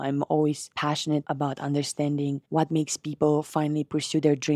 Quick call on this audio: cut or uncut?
cut